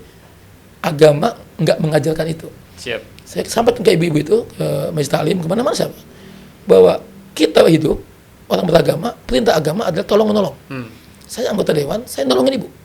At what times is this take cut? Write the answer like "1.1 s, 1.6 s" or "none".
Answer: none